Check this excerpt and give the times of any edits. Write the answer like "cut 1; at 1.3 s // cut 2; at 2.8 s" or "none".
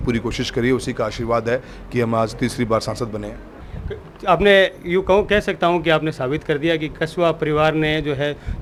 none